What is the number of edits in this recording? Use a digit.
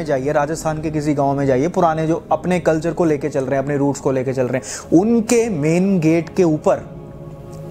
0